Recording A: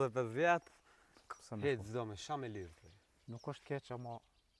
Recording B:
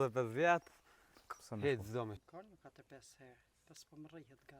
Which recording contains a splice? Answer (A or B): B